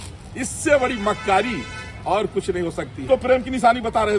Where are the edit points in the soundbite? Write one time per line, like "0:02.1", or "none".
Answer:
0:03.0